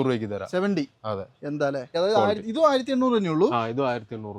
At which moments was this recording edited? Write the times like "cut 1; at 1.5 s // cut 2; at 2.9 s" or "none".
cut 1; at 1.9 s

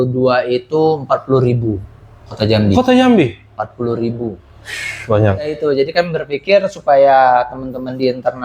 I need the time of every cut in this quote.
cut 1; at 5.7 s

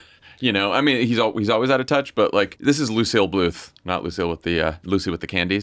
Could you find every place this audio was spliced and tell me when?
cut 1; at 2.5 s

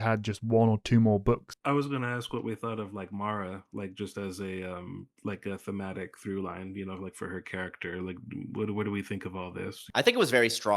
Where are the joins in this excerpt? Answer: cut 1; at 1.5 s // cut 2; at 9.8 s

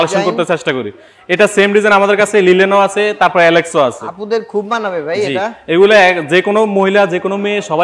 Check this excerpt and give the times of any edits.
none

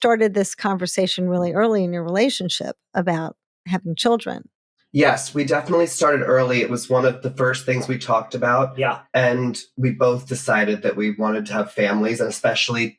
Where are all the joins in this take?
none

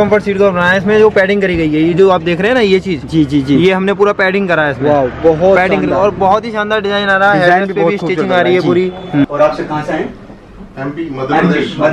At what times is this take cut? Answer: cut 1; at 9.2 s

